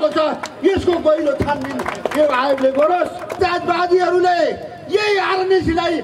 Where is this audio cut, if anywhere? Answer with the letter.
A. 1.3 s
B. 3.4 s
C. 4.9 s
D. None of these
B